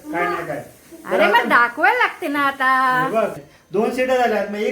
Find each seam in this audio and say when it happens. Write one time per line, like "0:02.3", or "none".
0:03.4